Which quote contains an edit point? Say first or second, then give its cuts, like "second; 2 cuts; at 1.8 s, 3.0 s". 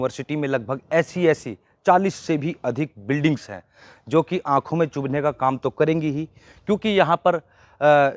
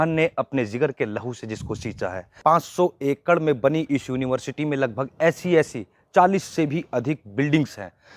second; 1 cut; at 2.4 s